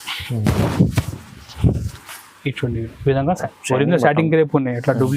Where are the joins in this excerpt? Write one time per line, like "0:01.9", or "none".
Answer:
0:03.5